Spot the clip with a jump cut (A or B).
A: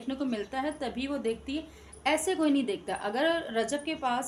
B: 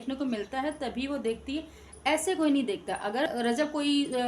B